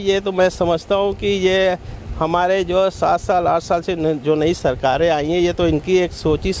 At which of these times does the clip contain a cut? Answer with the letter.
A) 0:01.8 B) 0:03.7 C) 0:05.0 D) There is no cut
D